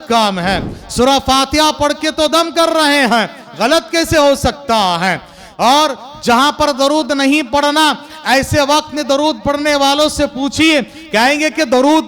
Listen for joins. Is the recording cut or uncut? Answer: uncut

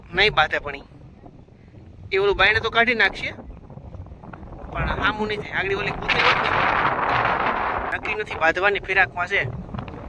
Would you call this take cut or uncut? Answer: cut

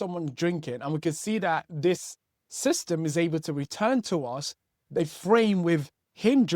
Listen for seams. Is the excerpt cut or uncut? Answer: cut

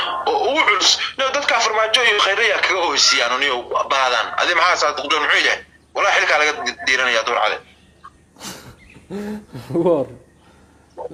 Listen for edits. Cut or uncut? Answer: uncut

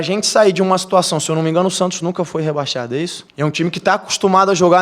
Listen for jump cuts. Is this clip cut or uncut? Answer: cut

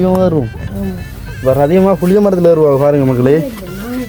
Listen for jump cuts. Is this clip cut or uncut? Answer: uncut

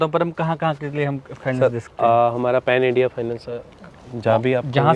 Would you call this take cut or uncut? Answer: uncut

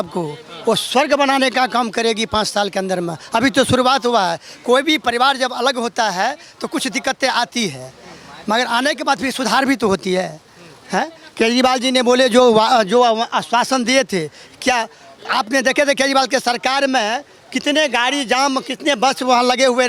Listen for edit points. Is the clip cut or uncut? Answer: uncut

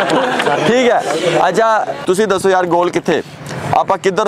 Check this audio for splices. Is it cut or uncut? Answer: cut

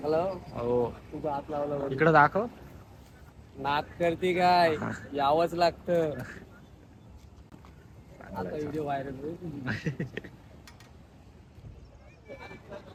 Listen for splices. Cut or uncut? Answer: uncut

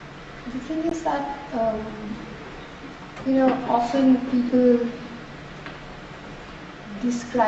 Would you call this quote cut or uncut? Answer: uncut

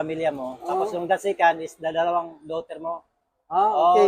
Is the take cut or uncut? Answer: uncut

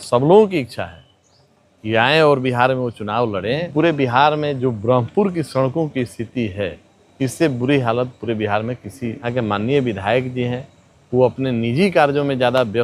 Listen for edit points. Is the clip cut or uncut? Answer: cut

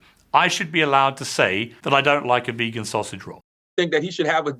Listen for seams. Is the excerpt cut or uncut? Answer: cut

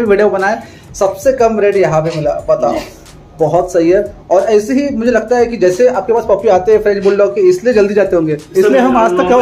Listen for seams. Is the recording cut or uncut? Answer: uncut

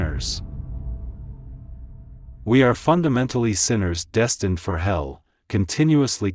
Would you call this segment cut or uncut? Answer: cut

